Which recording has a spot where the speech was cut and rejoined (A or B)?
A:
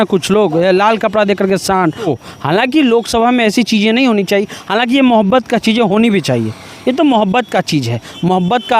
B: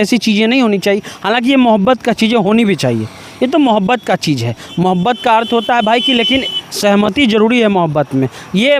A